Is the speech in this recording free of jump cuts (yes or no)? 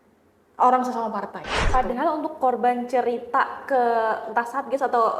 no